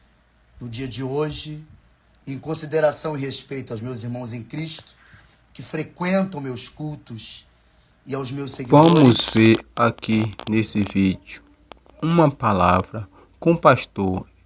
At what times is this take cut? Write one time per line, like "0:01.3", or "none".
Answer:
0:08.7